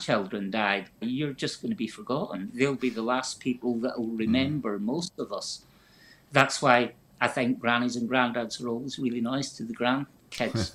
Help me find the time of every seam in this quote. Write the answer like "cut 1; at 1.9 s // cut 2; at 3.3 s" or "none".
cut 1; at 1.0 s